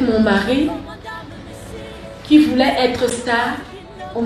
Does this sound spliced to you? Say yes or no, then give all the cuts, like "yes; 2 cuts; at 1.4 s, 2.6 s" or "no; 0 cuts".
no; 0 cuts